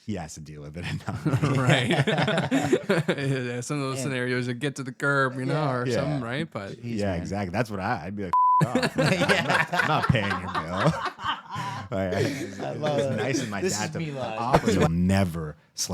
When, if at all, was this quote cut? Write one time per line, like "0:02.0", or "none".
0:14.9